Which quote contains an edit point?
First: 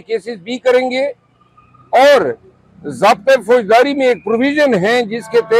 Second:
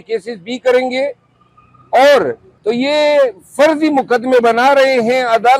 second; 1 cut; at 2.5 s

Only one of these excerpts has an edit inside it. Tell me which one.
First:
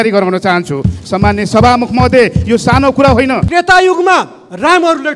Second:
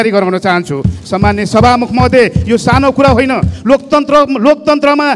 first; 1 cut; at 3.5 s

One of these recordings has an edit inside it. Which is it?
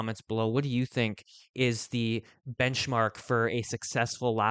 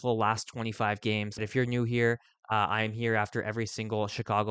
second; 1 cut; at 1.4 s

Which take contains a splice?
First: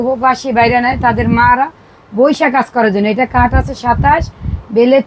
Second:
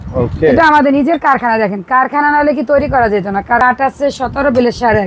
second; 1 cut; at 3.6 s

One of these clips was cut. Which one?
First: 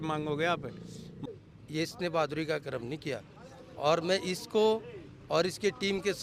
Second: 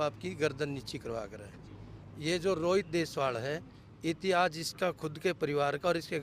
first; 1 cut; at 1.1 s

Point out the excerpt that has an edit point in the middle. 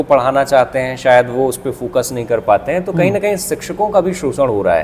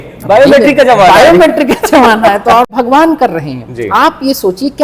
second; 1 cut; at 2.7 s

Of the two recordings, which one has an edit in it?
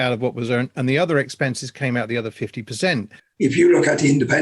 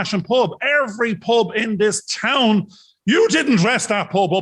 first; 1 cut; at 3.2 s

